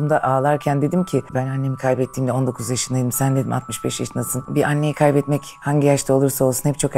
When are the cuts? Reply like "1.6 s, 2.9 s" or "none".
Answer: 1.3 s, 4.5 s